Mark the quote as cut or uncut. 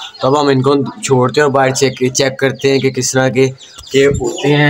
uncut